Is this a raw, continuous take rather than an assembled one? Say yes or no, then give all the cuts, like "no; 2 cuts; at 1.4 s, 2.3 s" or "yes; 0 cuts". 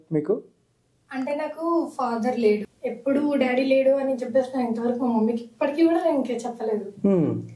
no; 1 cut; at 2.6 s